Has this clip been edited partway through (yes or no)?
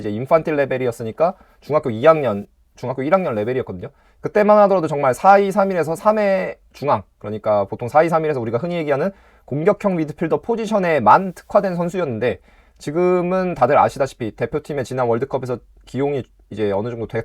no